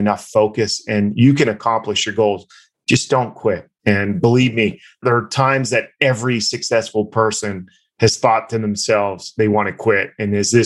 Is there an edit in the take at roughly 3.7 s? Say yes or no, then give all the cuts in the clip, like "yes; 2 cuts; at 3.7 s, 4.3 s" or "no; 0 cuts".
yes; 1 cut; at 3.7 s